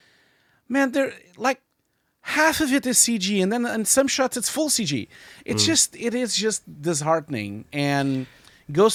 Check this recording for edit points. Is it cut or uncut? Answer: uncut